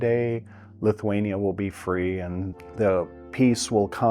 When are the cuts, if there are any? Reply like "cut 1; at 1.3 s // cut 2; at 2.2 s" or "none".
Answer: cut 1; at 2.6 s